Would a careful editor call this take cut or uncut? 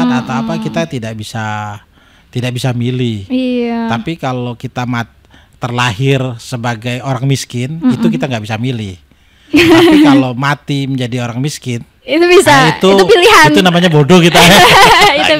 uncut